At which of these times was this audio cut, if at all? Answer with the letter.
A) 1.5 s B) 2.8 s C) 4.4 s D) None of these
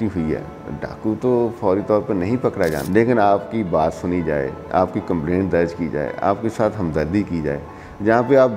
B